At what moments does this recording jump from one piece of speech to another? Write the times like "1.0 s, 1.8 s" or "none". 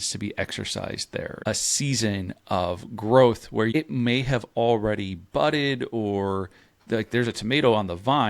1.4 s, 3.7 s